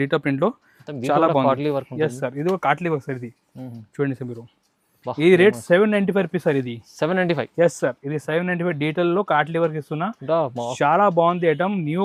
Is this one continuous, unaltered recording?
yes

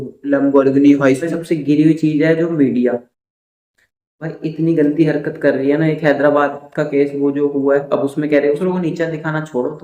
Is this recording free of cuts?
no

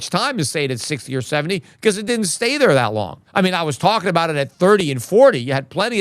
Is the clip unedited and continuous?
no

